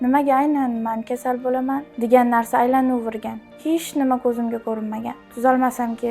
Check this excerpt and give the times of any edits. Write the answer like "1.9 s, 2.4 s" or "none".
1.9 s, 5.2 s